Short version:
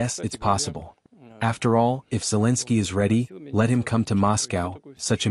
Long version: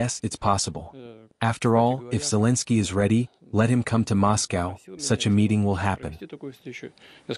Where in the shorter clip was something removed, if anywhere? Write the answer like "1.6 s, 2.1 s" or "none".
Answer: none